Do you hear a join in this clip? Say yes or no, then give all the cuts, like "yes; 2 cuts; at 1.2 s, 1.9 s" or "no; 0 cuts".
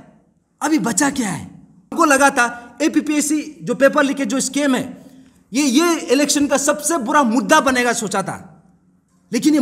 yes; 1 cut; at 1.9 s